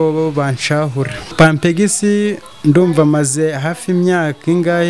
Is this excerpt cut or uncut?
cut